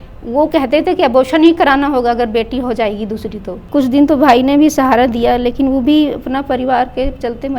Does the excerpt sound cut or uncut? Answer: cut